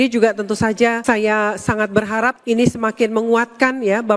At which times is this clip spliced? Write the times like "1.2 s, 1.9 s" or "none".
1.0 s, 2.4 s